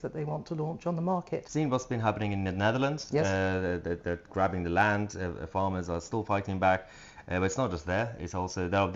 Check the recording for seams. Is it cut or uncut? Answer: cut